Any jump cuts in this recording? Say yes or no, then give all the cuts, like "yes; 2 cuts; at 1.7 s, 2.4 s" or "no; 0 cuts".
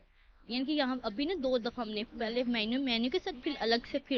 no; 0 cuts